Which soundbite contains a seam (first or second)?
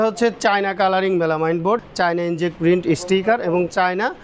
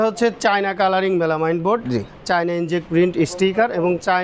first